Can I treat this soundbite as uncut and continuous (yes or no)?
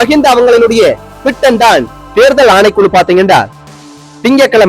no